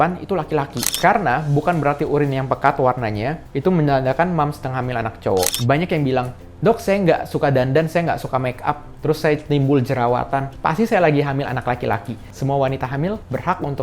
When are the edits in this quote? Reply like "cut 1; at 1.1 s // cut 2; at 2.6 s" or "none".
cut 1; at 0.9 s // cut 2; at 5.6 s // cut 3; at 12.3 s

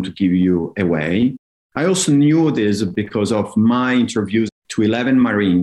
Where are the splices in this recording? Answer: cut 1; at 4.5 s

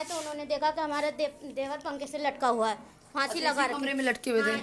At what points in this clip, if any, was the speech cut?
none

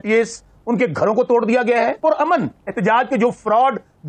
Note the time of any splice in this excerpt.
cut 1; at 2.0 s

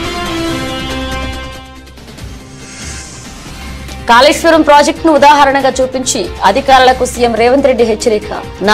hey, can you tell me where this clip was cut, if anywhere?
cut 1; at 3.6 s

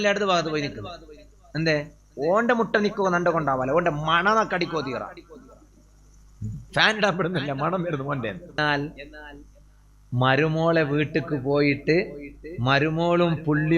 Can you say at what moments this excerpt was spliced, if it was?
cut 1; at 8.6 s

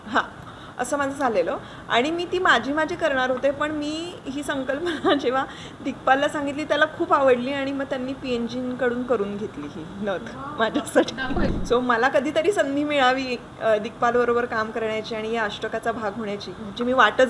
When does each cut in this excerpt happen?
cut 1; at 11.5 s

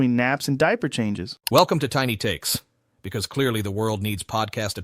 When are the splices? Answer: cut 1; at 1.3 s

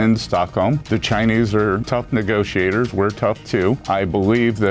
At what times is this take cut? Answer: cut 1; at 0.8 s // cut 2; at 1.8 s // cut 3; at 3.8 s

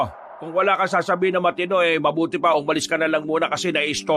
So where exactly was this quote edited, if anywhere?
none

